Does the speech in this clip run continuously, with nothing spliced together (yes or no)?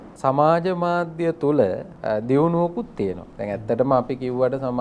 no